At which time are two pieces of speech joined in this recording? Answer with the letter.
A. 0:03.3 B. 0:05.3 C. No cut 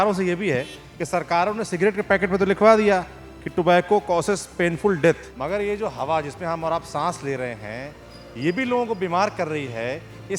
B